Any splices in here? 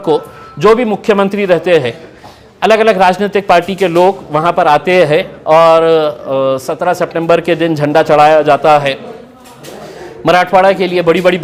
no; 0 cuts

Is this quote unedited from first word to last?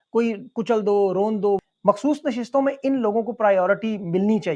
no; 1 cut; at 1.6 s

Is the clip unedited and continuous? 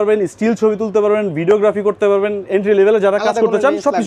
yes; 0 cuts

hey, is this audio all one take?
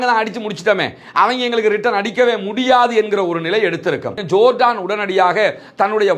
no; 1 cut; at 4.2 s

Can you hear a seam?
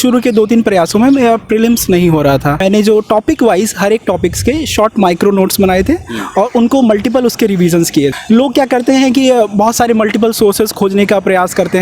yes; 2 cuts; at 2.6 s, 8.1 s

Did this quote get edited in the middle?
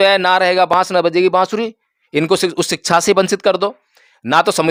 no; 0 cuts

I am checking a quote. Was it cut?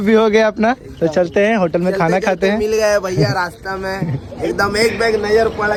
no; 0 cuts

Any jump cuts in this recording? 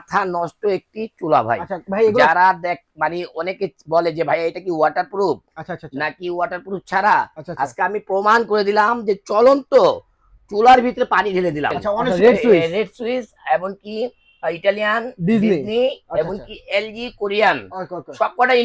yes; 1 cut; at 12.1 s

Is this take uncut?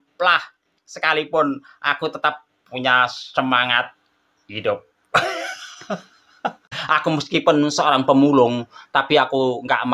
no; 1 cut; at 6.7 s

